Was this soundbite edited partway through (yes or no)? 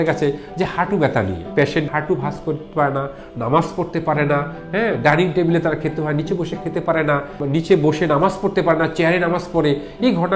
yes